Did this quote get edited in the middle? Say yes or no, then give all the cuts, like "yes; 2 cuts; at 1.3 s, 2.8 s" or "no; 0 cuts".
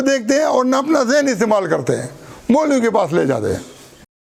no; 0 cuts